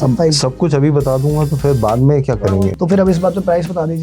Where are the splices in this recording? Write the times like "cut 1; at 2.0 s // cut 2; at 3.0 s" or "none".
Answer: cut 1; at 2.8 s